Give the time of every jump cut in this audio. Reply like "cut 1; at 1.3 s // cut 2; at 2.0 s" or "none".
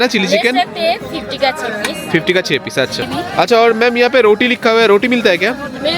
cut 1; at 3.1 s